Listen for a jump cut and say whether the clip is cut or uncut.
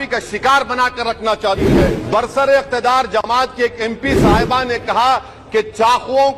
cut